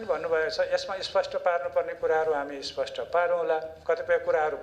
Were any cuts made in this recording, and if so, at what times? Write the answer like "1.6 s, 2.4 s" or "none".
none